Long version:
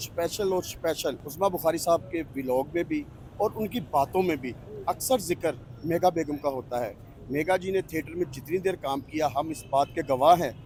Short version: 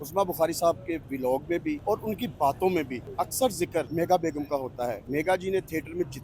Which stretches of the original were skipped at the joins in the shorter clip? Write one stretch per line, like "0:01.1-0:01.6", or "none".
0:03.0-0:03.3
0:04.5-0:04.7
0:05.6-0:05.8
0:06.9-0:07.2